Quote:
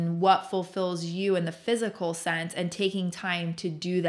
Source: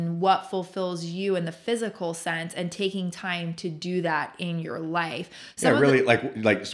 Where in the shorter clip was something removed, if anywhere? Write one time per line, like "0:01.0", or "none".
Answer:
none